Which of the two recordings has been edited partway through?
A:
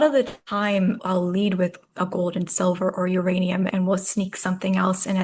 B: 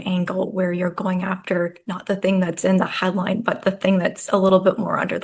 A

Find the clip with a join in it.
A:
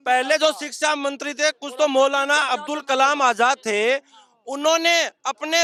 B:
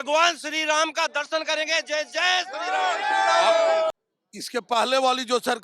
B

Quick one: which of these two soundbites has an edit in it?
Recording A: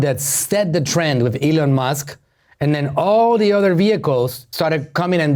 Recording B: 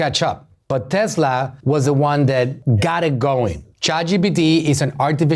B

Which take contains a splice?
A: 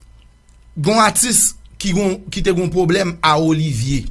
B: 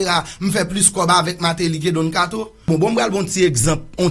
B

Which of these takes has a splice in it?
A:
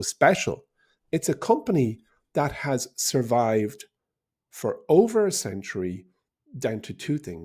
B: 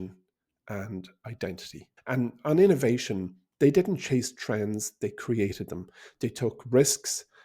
B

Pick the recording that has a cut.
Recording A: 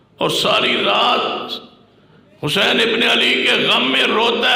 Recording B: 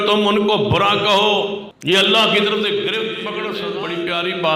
B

